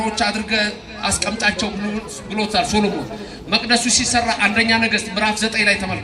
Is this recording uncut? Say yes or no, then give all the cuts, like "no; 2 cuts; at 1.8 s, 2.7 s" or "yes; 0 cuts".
yes; 0 cuts